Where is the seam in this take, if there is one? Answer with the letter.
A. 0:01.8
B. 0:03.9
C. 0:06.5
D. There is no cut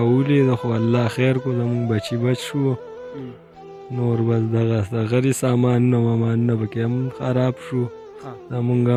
D